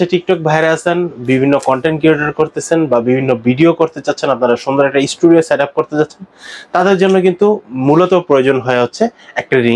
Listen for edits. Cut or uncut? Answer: uncut